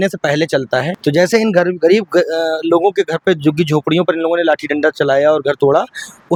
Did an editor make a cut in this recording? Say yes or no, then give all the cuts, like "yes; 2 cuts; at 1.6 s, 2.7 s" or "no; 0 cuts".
no; 0 cuts